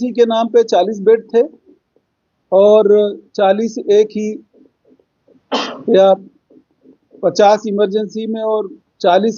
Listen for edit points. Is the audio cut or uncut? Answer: uncut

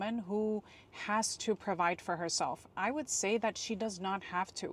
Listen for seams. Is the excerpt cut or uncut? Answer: uncut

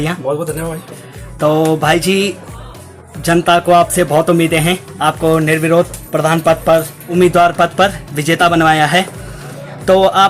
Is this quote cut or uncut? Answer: uncut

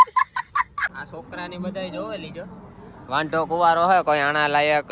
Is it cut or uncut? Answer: cut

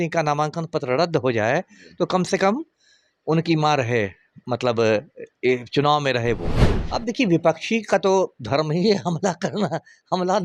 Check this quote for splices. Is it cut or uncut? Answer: cut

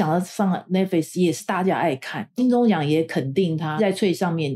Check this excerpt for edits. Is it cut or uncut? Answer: cut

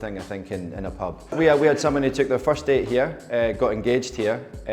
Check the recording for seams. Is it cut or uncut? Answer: cut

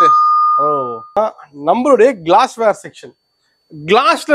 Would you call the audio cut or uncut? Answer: cut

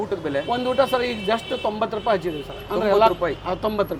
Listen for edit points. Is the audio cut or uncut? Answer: uncut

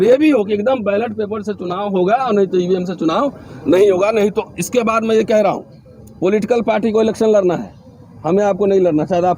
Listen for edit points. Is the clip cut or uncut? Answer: uncut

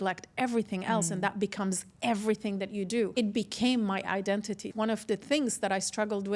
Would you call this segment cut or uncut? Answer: cut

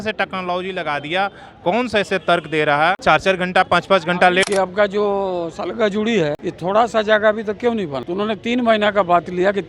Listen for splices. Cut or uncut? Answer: cut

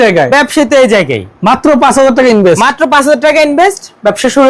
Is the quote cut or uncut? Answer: uncut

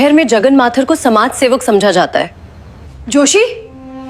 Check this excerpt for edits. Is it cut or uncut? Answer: uncut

